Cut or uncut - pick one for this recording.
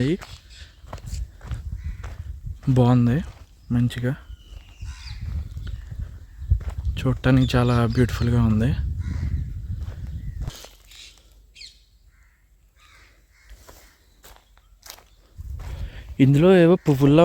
cut